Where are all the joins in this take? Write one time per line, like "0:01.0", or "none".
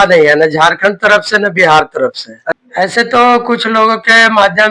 0:02.6